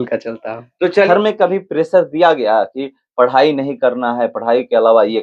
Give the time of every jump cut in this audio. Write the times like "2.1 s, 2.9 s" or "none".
1.1 s